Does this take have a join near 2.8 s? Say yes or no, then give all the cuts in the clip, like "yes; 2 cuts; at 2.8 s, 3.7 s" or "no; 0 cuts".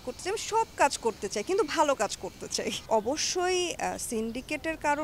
yes; 1 cut; at 2.8 s